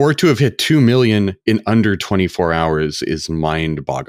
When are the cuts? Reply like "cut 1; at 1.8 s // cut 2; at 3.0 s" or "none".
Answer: none